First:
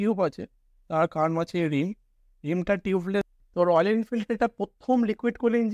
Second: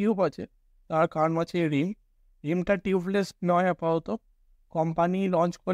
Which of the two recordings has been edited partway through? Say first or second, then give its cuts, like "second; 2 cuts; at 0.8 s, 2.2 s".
first; 1 cut; at 3.3 s